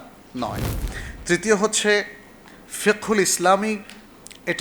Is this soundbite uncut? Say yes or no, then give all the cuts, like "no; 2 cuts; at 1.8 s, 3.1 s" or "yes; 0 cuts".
yes; 0 cuts